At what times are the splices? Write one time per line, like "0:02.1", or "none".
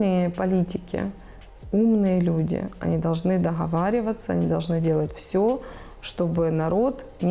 none